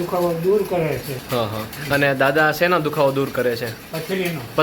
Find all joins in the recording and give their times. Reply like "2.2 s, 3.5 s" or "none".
1.3 s

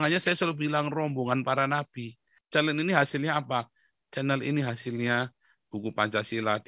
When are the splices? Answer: 2.3 s

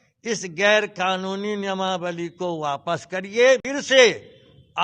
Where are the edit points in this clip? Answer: 3.7 s

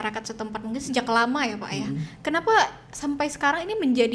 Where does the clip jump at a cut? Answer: none

